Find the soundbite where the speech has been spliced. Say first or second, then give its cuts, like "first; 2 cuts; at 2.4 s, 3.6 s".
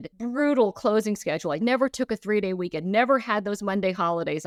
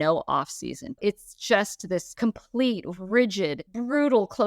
second; 2 cuts; at 0.9 s, 2.1 s